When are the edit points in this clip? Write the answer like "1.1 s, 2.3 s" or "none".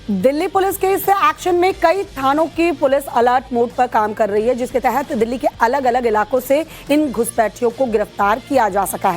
1.6 s